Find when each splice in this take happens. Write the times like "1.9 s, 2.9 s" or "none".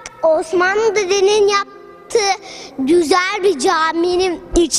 none